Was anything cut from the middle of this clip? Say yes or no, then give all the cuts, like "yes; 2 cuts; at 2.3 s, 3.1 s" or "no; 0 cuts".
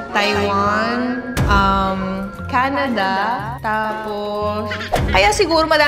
yes; 1 cut; at 4.9 s